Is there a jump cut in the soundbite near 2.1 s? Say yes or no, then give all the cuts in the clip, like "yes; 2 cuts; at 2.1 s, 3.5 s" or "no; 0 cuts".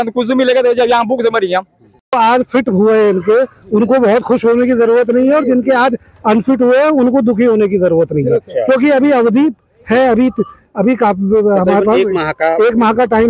yes; 1 cut; at 2.1 s